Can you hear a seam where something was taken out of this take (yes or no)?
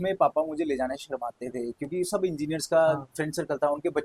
no